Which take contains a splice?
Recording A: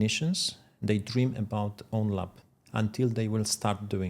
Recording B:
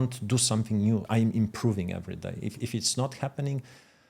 B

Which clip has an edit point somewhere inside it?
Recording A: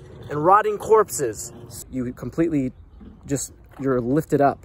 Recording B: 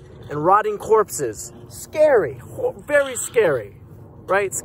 A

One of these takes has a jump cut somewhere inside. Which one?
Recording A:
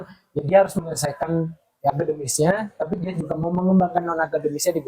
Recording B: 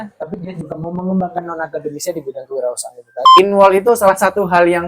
B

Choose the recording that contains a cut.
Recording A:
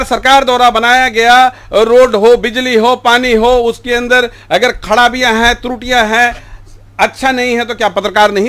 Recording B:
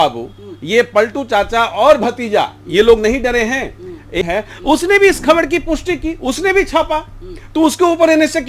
B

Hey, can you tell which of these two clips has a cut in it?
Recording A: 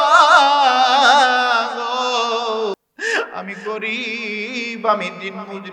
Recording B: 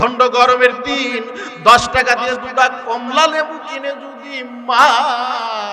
A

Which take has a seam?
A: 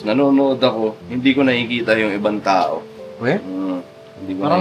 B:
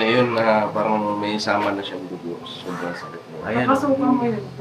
A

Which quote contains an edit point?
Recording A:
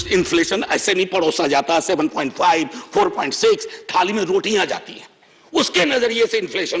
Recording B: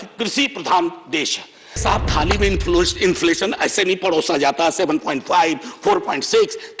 B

